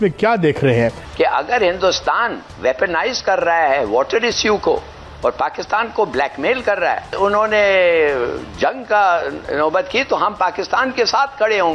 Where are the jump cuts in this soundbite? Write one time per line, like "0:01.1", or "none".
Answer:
0:01.0